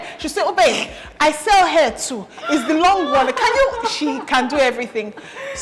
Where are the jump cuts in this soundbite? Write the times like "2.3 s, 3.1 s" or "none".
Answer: none